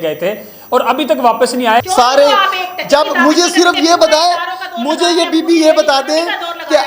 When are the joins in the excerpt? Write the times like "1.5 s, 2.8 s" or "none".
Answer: 1.9 s